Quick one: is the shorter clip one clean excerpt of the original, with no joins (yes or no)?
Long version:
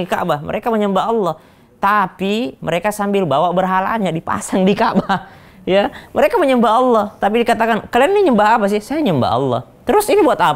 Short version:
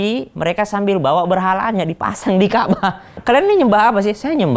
no